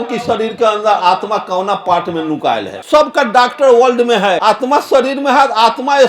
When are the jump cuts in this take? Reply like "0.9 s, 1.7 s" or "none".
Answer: 2.7 s, 4.4 s

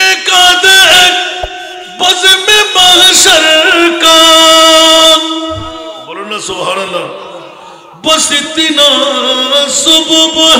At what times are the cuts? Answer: none

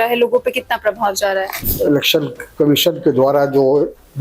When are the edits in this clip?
1.6 s

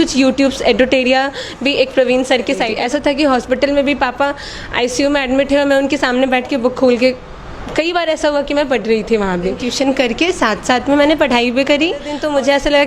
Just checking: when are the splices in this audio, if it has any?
2.7 s, 9.7 s, 12.1 s

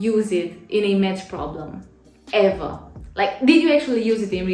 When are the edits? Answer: none

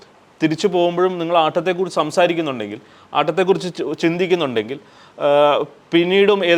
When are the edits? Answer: none

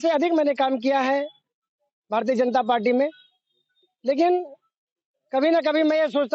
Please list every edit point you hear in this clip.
none

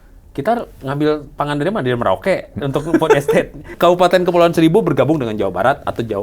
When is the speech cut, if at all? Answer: 3.6 s

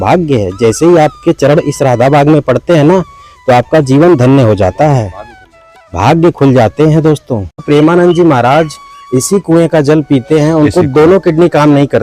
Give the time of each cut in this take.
7.6 s

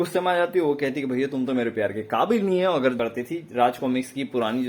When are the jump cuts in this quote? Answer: 3.0 s

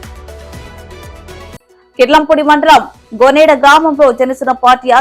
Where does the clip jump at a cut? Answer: 1.2 s

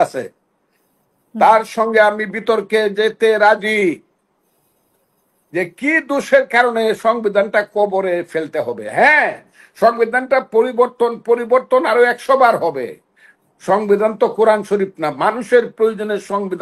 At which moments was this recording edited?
none

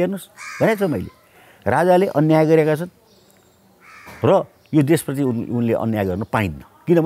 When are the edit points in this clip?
none

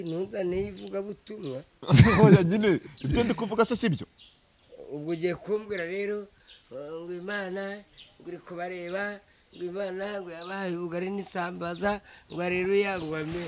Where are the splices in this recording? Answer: none

